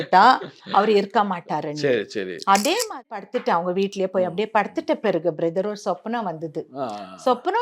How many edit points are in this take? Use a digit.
1